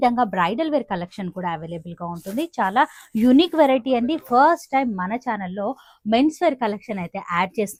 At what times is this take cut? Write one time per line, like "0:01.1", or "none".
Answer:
none